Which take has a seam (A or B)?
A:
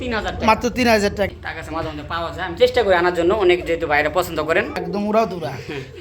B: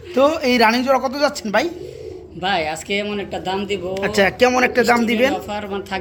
A